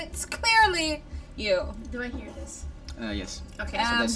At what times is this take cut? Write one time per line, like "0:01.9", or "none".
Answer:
none